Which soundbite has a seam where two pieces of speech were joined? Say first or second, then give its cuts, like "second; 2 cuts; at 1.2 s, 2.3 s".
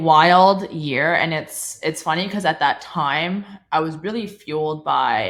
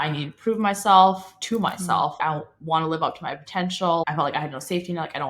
second; 2 cuts; at 2.1 s, 4.0 s